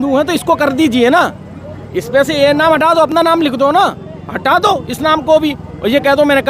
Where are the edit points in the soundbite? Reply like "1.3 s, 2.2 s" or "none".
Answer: none

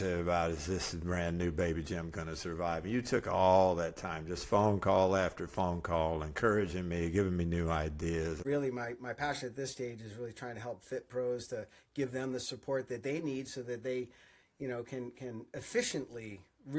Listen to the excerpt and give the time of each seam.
8.4 s

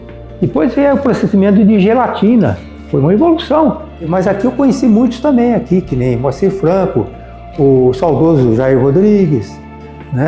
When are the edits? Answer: 4.1 s

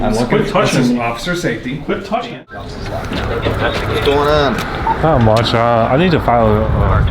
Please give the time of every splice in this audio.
2.7 s

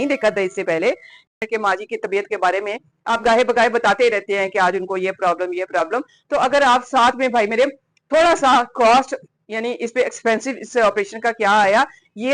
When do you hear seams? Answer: 1.3 s

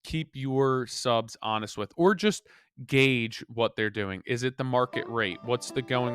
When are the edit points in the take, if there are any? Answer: none

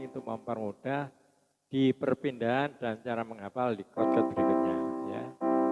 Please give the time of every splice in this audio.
none

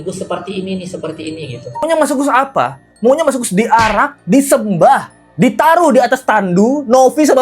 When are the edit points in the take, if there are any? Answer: 1.8 s

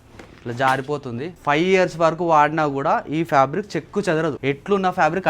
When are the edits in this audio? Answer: 1.4 s, 4.4 s

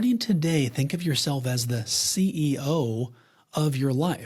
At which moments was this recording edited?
none

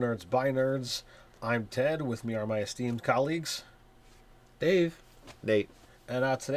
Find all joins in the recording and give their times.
4.1 s

